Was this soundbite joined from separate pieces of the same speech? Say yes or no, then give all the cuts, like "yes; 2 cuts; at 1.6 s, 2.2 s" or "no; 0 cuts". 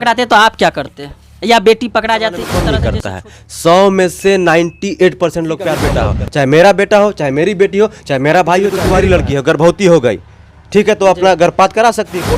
yes; 3 cuts; at 2.7 s, 5.9 s, 8.8 s